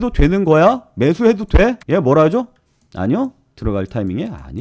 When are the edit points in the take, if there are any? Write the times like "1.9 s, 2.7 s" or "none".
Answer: none